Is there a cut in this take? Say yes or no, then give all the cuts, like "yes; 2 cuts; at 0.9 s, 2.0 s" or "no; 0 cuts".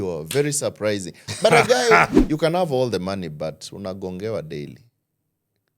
yes; 1 cut; at 2.2 s